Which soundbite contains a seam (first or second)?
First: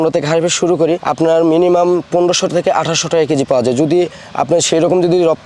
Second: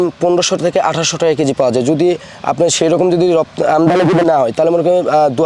first